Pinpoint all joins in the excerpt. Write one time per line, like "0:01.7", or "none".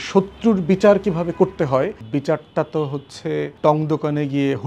0:02.0
0:03.5